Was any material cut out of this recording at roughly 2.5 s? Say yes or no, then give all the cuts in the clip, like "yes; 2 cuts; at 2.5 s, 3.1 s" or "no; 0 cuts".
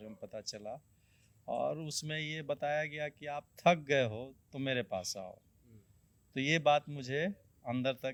no; 0 cuts